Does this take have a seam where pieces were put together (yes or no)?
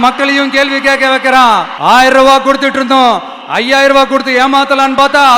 yes